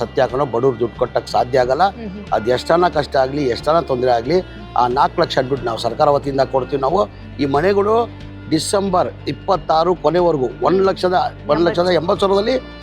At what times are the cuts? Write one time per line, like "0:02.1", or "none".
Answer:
none